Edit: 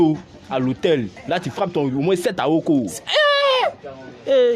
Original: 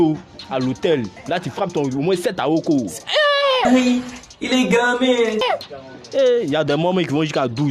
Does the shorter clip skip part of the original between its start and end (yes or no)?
yes